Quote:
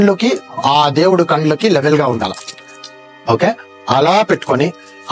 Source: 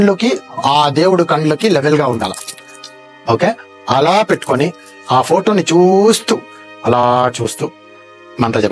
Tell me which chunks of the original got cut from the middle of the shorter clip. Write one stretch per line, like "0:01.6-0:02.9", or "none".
none